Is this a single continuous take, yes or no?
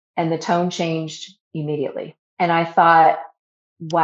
no